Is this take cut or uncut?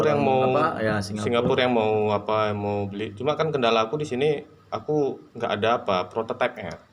uncut